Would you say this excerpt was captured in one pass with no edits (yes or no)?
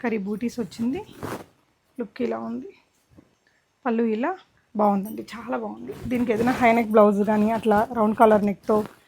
no